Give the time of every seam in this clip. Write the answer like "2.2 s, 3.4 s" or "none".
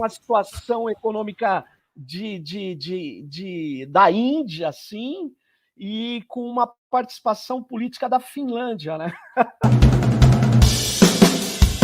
9.7 s